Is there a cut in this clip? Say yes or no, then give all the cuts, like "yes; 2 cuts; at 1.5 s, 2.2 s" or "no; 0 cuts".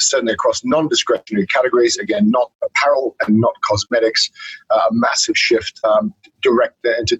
no; 0 cuts